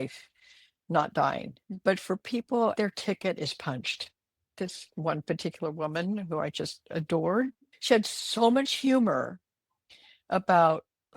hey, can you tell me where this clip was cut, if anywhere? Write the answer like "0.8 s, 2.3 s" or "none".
1.5 s, 2.7 s, 4.5 s